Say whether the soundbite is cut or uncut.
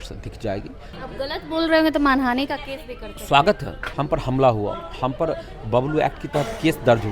cut